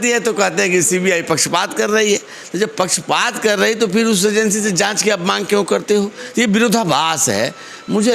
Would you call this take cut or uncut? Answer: uncut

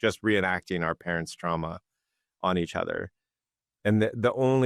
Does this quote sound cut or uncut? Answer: uncut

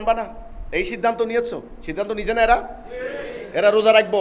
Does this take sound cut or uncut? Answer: uncut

